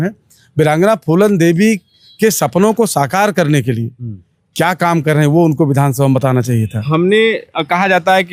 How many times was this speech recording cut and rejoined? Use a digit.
0